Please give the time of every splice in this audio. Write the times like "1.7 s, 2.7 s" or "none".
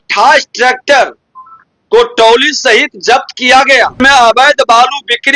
4.0 s